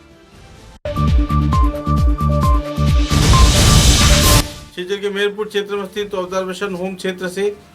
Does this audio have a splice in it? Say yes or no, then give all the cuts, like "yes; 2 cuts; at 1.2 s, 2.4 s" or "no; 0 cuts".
yes; 2 cuts; at 0.8 s, 4.6 s